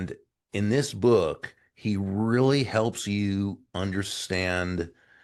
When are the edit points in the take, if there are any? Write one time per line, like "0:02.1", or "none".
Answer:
none